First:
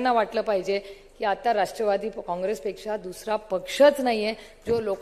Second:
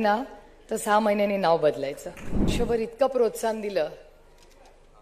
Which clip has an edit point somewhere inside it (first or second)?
second